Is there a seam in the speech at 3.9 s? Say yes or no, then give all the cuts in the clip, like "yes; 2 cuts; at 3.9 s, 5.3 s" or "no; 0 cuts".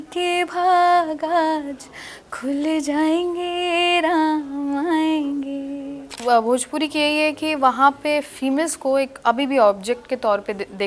no; 1 cut; at 6.1 s